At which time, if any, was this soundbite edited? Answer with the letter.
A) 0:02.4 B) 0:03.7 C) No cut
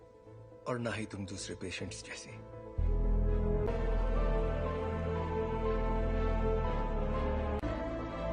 B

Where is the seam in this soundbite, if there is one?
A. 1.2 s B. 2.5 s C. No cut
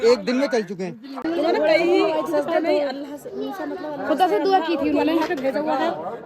A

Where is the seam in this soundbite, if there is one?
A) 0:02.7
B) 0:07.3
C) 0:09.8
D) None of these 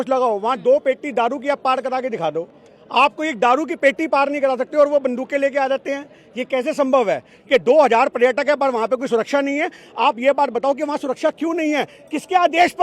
B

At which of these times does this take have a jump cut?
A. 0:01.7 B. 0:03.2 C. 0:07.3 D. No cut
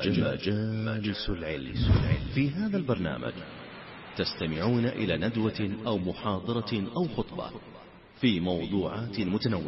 A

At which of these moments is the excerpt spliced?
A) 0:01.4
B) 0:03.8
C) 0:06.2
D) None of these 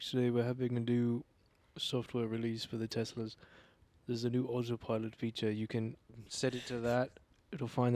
C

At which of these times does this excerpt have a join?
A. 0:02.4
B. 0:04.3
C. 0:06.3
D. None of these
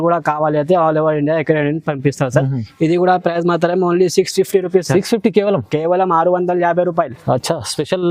D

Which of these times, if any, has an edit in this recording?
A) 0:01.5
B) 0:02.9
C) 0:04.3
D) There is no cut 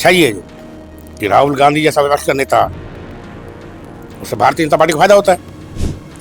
D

